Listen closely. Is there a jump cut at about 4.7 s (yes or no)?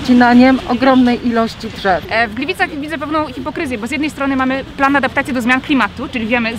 no